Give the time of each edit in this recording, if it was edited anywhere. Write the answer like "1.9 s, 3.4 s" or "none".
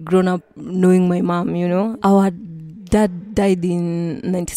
none